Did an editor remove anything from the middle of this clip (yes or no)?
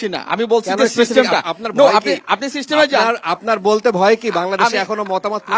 no